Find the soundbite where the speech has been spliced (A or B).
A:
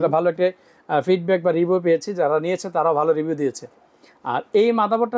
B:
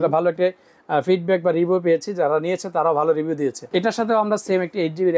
B